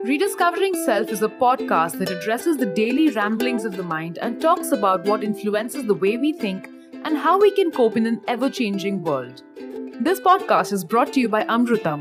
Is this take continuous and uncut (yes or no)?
yes